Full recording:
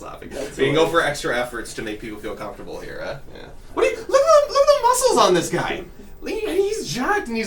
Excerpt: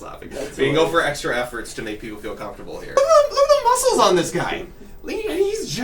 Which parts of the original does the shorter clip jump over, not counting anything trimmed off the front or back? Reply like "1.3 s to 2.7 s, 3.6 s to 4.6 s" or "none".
3.0 s to 4.2 s